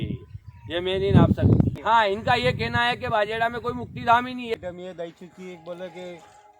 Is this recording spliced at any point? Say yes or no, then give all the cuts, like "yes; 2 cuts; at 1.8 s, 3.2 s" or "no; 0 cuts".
yes; 2 cuts; at 1.8 s, 4.5 s